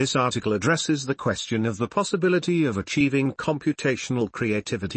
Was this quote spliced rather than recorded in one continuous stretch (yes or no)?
no